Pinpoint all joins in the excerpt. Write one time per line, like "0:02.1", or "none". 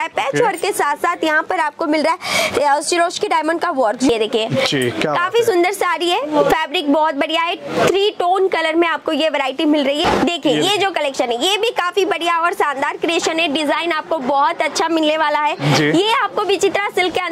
0:04.1
0:10.0